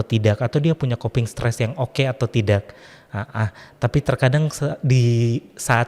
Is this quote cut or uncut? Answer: uncut